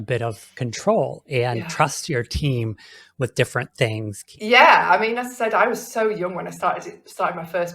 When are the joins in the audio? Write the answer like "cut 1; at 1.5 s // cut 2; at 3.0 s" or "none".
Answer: cut 1; at 4.2 s

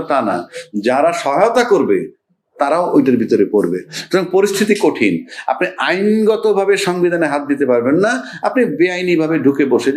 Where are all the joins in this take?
none

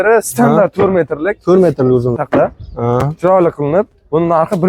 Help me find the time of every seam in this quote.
cut 1; at 2.2 s

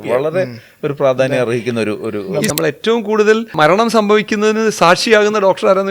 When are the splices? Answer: cut 1; at 2.5 s // cut 2; at 3.5 s

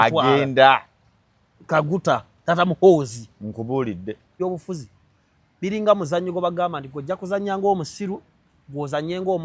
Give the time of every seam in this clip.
cut 1; at 4.4 s

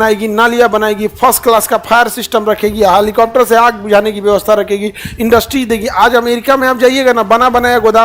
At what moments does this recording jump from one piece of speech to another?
none

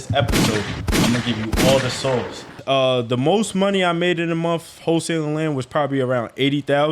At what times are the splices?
cut 1; at 2.6 s

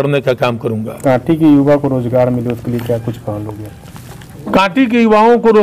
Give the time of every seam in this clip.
cut 1; at 0.9 s

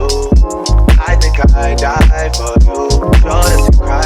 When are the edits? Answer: none

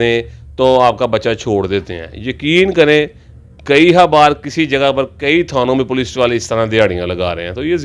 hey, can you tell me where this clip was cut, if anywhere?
none

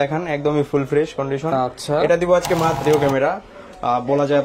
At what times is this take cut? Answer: cut 1; at 2.8 s

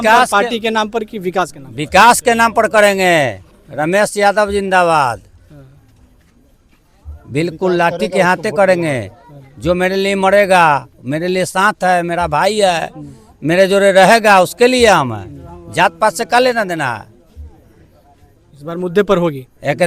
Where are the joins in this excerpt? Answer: none

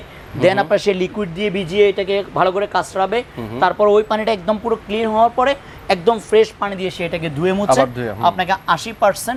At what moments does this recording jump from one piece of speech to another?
none

